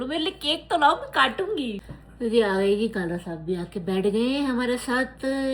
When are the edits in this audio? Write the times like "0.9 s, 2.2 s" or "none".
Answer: 1.8 s